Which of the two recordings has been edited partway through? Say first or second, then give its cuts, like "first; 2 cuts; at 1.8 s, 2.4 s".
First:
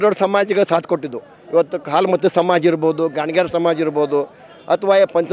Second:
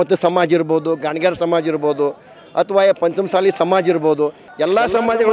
second; 1 cut; at 4.4 s